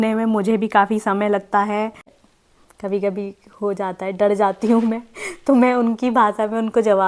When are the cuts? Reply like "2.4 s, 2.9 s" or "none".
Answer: 2.1 s